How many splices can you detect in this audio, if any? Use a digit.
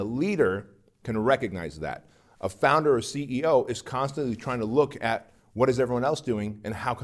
0